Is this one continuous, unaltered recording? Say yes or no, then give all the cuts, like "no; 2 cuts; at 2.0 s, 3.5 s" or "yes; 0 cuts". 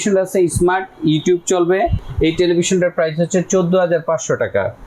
yes; 0 cuts